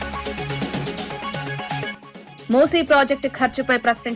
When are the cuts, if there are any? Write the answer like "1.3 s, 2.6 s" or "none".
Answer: 1.9 s

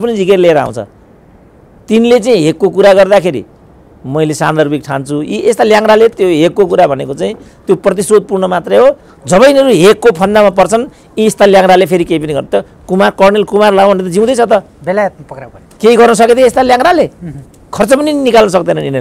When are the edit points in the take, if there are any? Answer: 9.1 s

